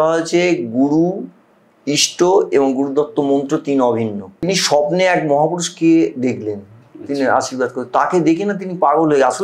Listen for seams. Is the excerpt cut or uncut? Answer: cut